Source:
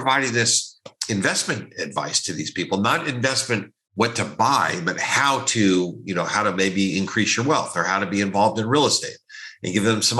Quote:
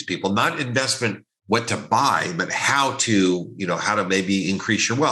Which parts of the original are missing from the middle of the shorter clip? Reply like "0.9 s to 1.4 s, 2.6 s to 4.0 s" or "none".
none